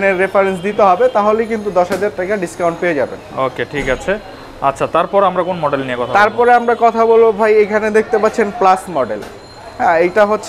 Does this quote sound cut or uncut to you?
uncut